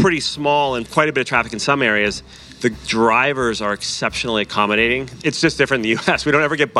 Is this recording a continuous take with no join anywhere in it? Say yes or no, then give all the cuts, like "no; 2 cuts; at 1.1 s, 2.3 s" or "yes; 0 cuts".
no; 2 cuts; at 0.9 s, 5.1 s